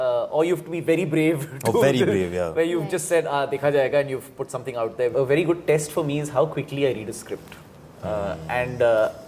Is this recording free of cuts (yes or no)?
no